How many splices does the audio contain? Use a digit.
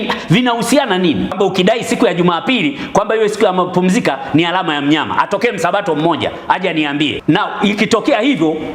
2